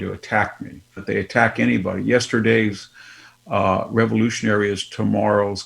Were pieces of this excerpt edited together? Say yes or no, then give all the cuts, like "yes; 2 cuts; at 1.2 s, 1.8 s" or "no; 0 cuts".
yes; 1 cut; at 1.0 s